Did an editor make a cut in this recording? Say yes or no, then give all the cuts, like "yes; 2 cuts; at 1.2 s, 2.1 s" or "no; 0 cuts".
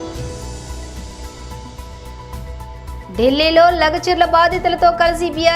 yes; 1 cut; at 2.7 s